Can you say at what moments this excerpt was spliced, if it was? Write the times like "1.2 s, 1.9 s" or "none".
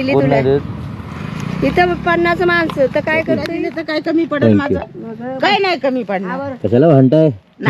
3.5 s